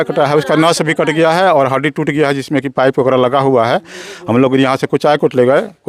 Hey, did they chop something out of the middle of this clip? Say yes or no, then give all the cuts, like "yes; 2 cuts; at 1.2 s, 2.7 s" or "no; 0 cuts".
no; 0 cuts